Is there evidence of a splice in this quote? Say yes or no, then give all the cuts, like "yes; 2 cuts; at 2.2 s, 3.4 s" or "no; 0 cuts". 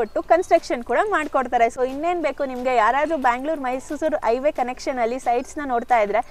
no; 0 cuts